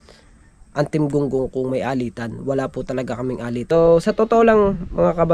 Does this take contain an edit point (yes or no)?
yes